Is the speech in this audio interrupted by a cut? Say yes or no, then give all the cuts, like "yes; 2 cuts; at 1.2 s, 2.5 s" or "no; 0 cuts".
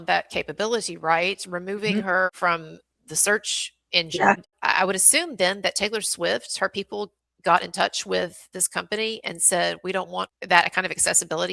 yes; 3 cuts; at 2.3 s, 4.6 s, 10.3 s